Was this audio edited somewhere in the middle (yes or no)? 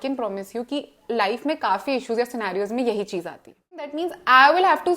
yes